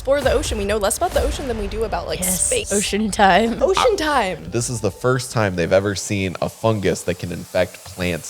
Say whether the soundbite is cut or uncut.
cut